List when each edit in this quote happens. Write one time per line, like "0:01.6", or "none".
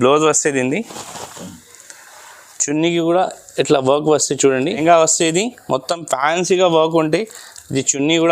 0:04.8